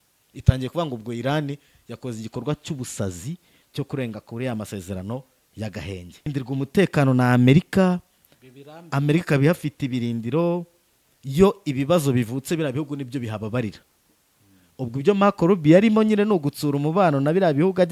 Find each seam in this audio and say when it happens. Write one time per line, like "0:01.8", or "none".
0:06.3